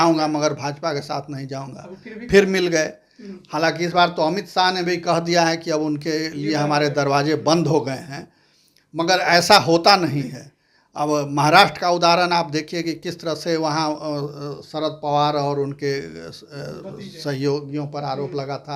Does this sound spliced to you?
no; 0 cuts

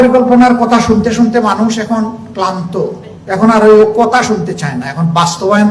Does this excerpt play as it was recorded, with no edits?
no; 1 cut; at 3.1 s

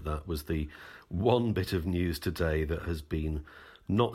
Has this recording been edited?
no; 0 cuts

